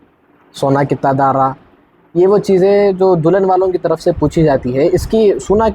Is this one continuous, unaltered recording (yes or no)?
yes